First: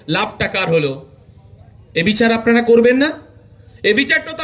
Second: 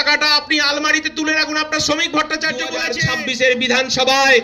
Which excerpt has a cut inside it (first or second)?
second